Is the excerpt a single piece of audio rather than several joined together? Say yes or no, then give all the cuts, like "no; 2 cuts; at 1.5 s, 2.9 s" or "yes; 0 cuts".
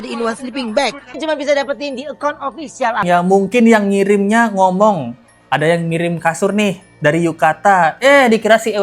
no; 2 cuts; at 1.2 s, 3.0 s